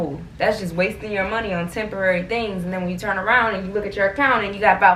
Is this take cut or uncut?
uncut